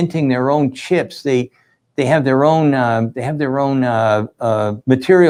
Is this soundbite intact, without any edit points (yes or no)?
yes